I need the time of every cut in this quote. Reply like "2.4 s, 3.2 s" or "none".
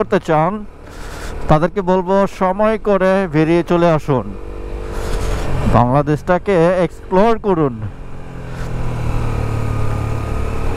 none